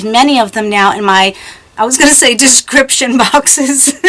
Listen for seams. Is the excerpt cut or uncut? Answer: uncut